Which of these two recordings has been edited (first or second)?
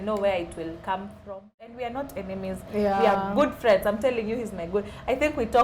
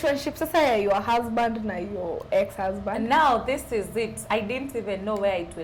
first